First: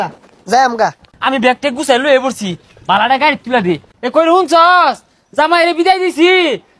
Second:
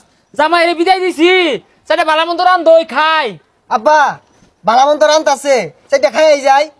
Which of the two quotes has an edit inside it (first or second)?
first